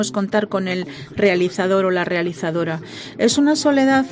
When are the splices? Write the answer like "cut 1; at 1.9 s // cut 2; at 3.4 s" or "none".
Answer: none

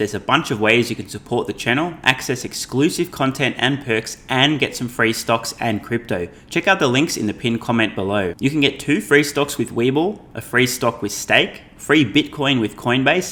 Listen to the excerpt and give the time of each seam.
none

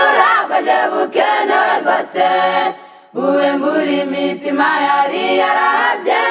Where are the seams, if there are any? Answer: cut 1; at 2.5 s

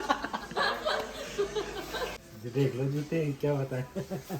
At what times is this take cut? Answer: cut 1; at 2.1 s

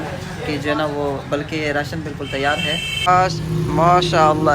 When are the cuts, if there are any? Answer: cut 1; at 3.0 s

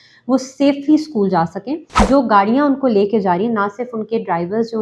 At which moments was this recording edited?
cut 1; at 2.0 s

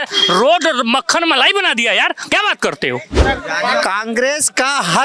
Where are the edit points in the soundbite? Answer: cut 1; at 3.2 s

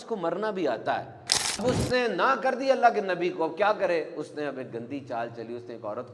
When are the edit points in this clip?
cut 1; at 1.6 s

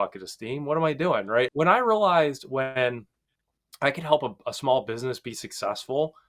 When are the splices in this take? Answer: cut 1; at 1.5 s

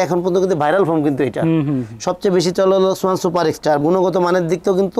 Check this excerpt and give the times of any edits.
none

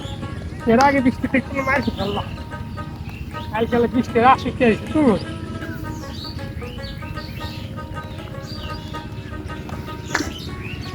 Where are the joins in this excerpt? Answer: none

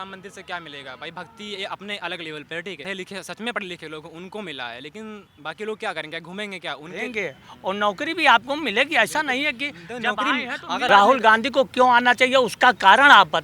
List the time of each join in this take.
cut 1; at 2.9 s // cut 2; at 7.0 s // cut 3; at 10.8 s

